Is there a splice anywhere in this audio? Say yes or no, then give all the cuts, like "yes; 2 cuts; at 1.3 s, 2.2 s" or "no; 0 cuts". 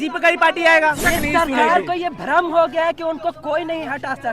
yes; 1 cut; at 1.0 s